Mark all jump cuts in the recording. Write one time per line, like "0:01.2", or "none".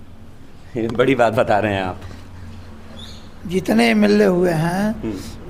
none